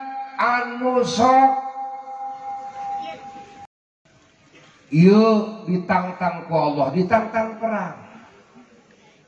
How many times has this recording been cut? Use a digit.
1